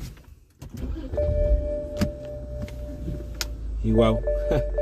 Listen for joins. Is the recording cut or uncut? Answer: uncut